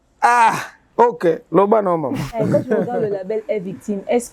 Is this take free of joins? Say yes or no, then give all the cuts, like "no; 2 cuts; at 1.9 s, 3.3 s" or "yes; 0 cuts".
yes; 0 cuts